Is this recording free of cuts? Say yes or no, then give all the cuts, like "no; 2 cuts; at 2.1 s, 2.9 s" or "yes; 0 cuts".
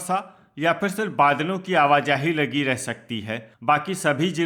yes; 0 cuts